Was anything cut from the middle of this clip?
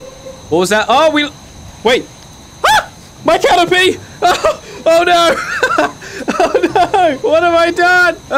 no; 0 cuts

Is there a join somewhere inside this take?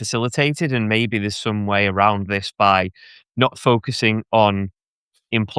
no; 0 cuts

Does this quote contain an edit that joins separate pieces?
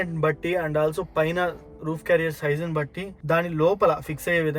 no; 0 cuts

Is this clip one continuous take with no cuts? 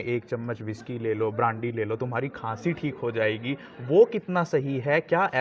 yes; 0 cuts

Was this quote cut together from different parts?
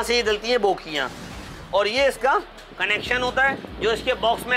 yes; 1 cut; at 1.4 s

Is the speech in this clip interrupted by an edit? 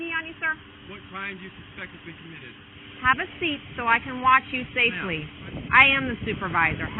yes; 2 cuts; at 2.7 s, 5.6 s

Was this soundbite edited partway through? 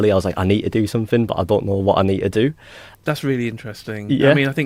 no; 0 cuts

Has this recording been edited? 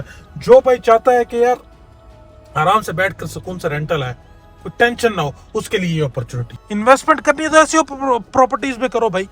yes; 1 cut; at 6.5 s

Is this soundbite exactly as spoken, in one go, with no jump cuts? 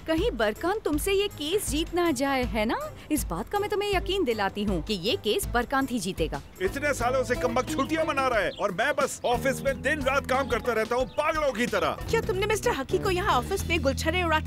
no; 2 cuts; at 6.4 s, 12.0 s

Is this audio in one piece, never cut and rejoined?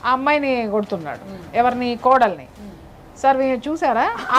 yes; 0 cuts

